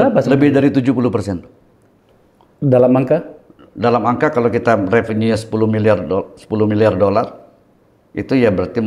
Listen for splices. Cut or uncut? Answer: uncut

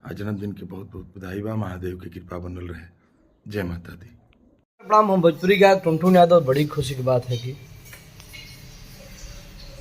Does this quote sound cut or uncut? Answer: cut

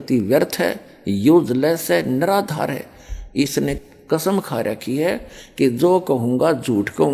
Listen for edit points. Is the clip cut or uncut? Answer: uncut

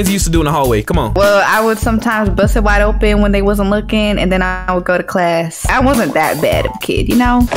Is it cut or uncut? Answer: uncut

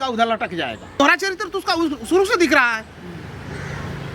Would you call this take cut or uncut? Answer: cut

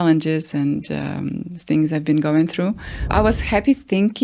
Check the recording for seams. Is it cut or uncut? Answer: cut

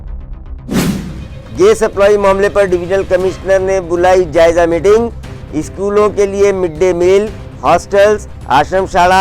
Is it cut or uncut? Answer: uncut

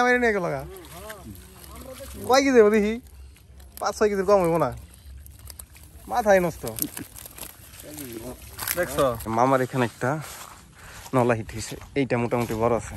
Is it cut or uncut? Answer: cut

